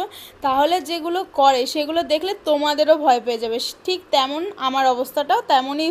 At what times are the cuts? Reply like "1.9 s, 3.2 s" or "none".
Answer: none